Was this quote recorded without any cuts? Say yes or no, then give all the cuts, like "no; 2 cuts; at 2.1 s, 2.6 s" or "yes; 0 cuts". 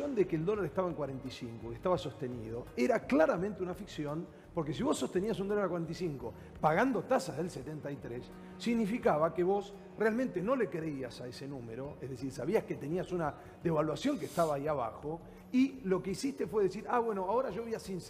yes; 0 cuts